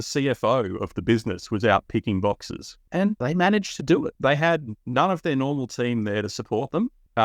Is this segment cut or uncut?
cut